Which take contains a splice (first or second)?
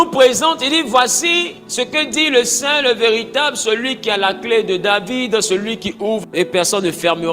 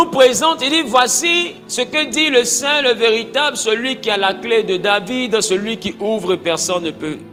first